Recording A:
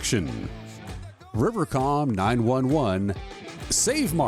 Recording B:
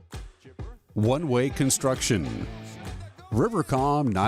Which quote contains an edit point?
B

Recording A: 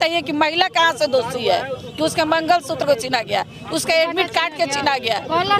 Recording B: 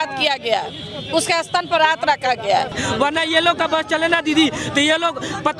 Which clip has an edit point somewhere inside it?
B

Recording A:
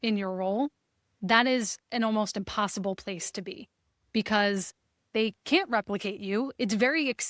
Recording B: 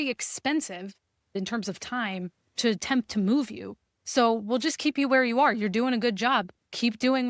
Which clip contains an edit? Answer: B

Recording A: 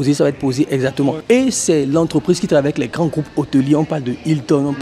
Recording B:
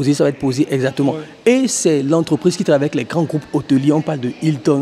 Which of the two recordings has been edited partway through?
A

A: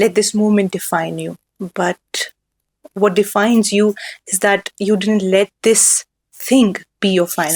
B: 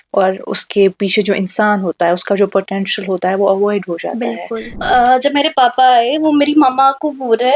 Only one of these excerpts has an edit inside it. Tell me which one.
B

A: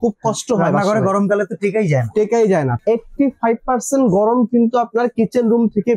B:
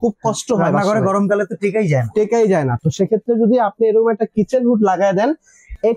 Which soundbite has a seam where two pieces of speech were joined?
A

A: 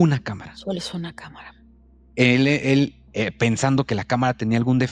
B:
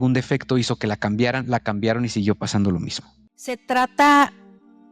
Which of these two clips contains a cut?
B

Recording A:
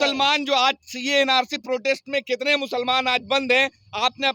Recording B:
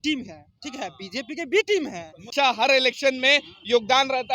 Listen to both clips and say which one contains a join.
B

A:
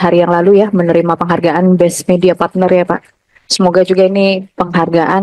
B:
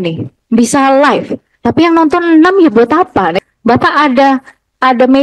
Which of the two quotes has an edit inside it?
B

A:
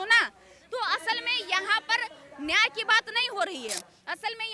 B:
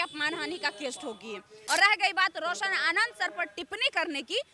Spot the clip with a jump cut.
B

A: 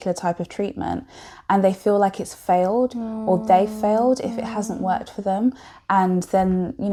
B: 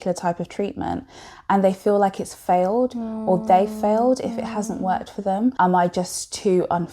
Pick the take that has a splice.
B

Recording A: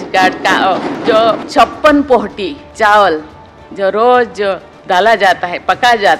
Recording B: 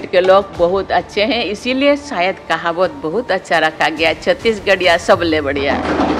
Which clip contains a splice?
A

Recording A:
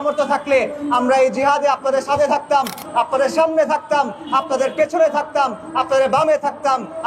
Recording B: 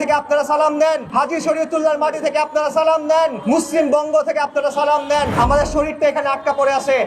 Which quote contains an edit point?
B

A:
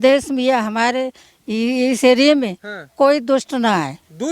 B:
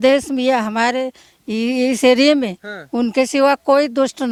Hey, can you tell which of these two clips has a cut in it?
A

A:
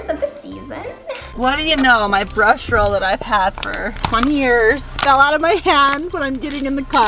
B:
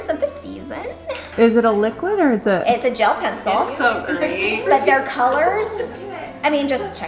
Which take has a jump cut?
A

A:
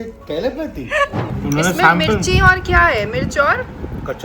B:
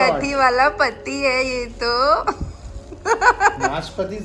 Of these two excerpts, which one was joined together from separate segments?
A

